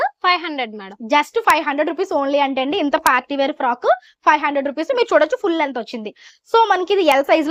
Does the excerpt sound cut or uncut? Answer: uncut